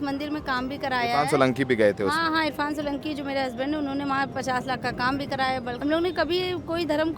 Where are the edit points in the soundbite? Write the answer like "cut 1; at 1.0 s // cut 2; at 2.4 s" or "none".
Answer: cut 1; at 5.8 s